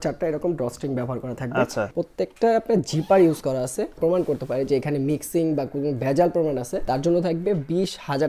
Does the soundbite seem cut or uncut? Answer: cut